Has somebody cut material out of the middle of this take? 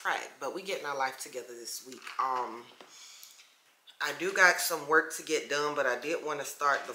no; 0 cuts

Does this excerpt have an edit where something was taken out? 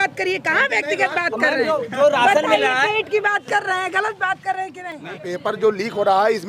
yes; 1 cut; at 5.1 s

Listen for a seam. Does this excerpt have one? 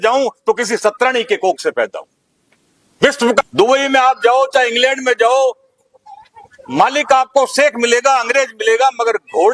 yes; 1 cut; at 3.4 s

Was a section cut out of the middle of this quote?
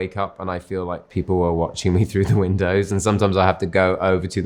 yes; 1 cut; at 1.0 s

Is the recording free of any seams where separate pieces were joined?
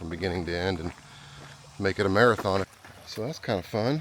no; 1 cut; at 2.7 s

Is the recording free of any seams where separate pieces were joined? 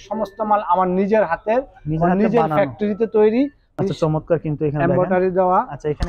no; 1 cut; at 3.8 s

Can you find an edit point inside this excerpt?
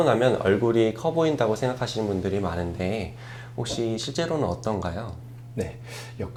no; 0 cuts

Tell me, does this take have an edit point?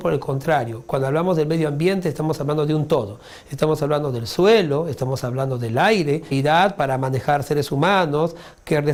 no; 0 cuts

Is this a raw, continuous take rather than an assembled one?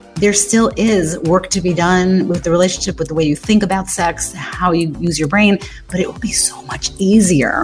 yes; 0 cuts

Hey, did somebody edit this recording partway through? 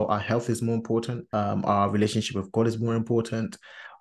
yes; 1 cut; at 1.2 s

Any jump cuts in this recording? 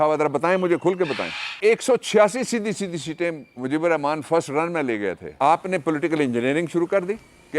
yes; 2 cuts; at 1.6 s, 5.2 s

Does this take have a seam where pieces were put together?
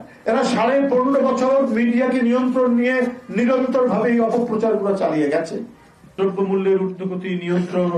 yes; 1 cut; at 6.2 s

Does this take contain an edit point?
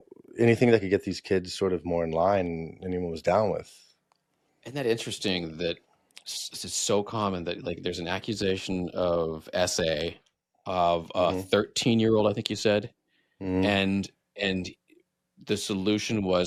no; 0 cuts

